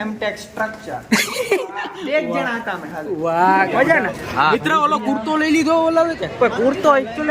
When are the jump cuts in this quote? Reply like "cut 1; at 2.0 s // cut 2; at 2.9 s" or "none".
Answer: cut 1; at 3.7 s

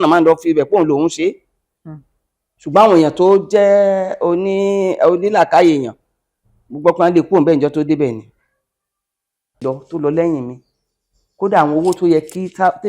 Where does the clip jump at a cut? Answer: cut 1; at 9.6 s

